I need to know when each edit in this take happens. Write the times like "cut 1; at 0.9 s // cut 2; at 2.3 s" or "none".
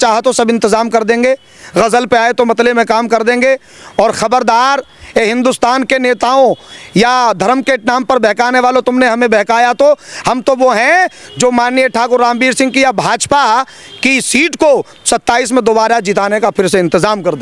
none